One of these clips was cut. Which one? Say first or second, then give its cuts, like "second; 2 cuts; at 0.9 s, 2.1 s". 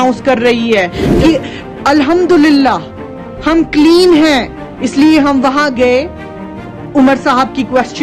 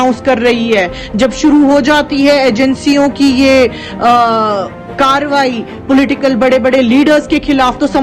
first; 1 cut; at 1.2 s